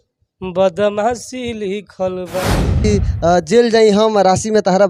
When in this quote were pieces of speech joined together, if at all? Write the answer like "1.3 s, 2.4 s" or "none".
2.8 s